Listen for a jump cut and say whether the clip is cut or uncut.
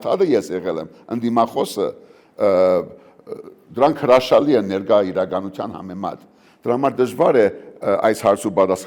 uncut